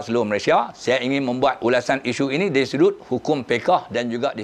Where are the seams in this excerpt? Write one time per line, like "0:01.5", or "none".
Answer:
0:01.6